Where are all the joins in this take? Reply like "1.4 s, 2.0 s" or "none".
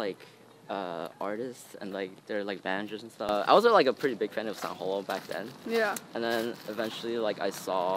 3.3 s